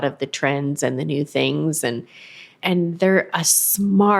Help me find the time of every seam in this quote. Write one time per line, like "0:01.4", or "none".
0:02.5